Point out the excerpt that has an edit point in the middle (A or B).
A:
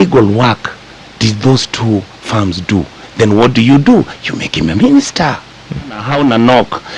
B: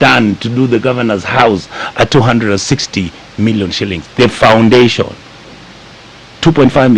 A